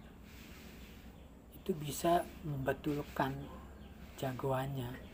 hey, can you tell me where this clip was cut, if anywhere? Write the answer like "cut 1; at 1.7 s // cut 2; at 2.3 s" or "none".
none